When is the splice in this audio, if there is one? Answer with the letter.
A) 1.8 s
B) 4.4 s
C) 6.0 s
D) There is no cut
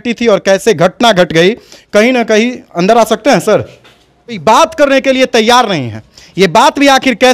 B